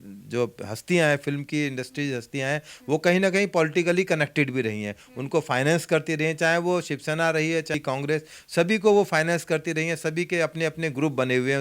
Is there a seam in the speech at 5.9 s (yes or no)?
no